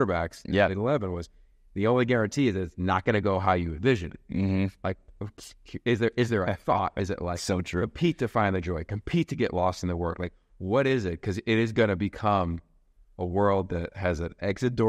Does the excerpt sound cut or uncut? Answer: uncut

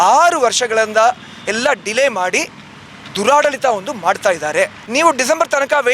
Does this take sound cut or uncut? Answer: cut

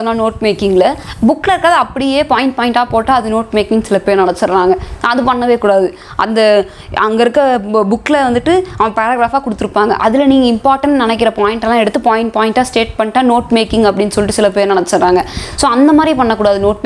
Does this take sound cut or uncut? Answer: uncut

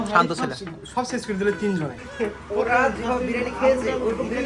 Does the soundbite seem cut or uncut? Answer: cut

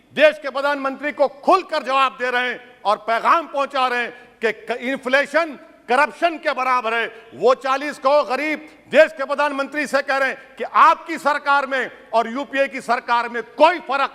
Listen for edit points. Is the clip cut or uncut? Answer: uncut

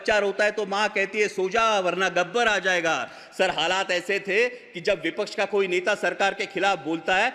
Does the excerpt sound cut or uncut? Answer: uncut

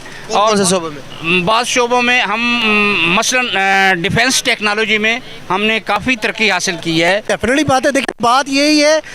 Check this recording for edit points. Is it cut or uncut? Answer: cut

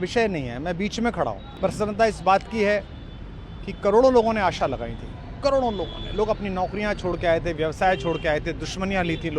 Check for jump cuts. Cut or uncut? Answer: cut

